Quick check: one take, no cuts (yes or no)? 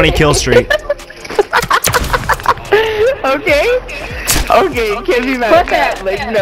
yes